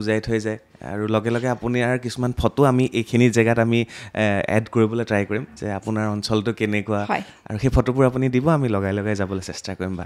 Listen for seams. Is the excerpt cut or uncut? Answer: uncut